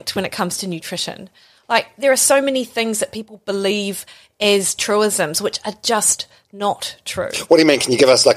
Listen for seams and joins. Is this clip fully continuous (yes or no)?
yes